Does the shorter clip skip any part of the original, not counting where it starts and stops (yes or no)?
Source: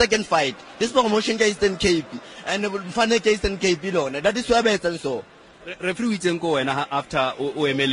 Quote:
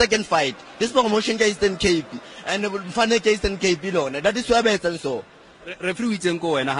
no